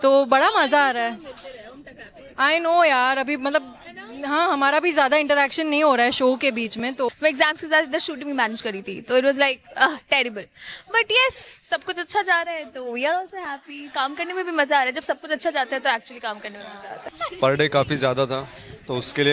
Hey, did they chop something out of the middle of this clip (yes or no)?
yes